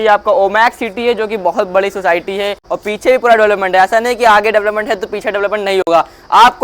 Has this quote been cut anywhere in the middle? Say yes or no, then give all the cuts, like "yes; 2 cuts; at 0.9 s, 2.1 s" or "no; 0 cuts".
yes; 1 cut; at 2.6 s